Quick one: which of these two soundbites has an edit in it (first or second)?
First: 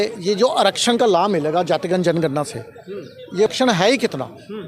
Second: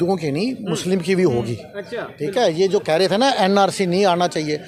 first